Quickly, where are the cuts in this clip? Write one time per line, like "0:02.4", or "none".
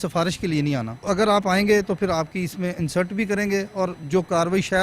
0:01.0
0:04.0